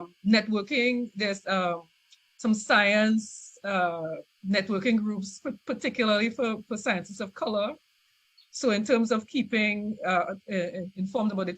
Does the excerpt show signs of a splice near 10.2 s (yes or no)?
no